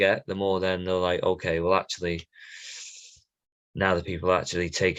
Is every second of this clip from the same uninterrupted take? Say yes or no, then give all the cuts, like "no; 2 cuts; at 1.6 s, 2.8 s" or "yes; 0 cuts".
yes; 0 cuts